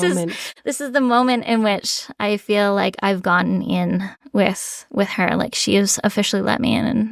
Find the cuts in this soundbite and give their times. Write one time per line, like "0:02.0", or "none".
none